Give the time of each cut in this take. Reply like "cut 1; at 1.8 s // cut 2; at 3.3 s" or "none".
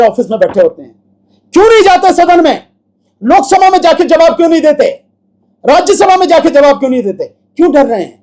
none